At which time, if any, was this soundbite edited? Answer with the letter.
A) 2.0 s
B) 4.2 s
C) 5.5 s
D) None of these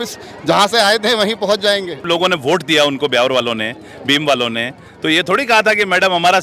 A